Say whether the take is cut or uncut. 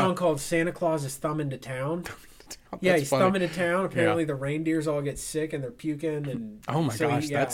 uncut